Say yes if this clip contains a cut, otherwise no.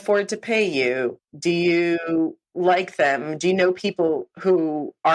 no